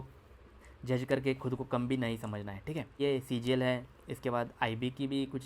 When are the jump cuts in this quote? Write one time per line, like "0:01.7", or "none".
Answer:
0:03.0